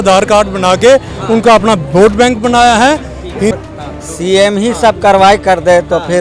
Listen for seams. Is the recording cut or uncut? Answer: cut